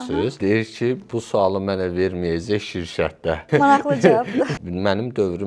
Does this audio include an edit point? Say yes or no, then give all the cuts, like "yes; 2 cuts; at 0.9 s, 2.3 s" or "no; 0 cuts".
yes; 3 cuts; at 0.8 s, 3.4 s, 4.5 s